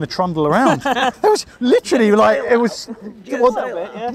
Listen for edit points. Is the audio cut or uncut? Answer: cut